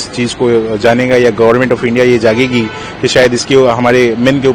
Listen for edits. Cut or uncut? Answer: uncut